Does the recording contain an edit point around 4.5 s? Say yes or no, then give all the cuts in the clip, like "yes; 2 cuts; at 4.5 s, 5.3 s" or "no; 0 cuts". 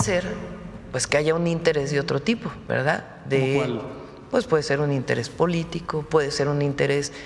no; 1 cut; at 2.5 s